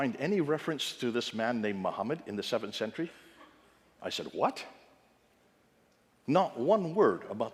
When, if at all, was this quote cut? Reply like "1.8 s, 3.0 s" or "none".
none